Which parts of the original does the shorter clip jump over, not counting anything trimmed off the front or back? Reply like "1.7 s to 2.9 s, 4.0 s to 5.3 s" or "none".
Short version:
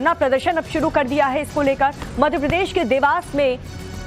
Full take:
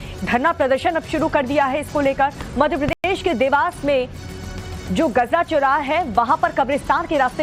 2.9 s to 3.0 s